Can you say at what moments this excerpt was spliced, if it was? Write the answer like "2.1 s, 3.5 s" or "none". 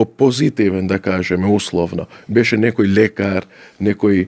none